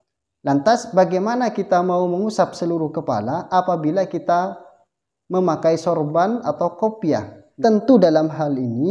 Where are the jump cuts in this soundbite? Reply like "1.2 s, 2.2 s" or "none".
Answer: 7.4 s